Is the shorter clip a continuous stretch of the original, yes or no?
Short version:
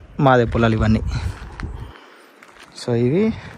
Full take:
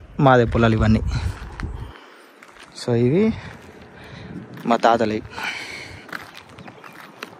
yes